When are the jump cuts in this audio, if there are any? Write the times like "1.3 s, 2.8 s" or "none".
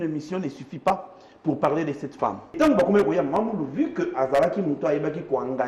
2.5 s